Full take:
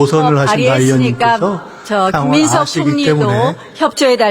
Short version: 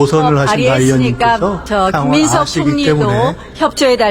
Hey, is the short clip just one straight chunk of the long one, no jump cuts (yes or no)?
no